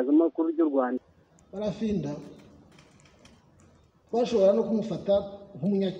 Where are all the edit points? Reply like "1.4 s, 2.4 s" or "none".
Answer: 1.0 s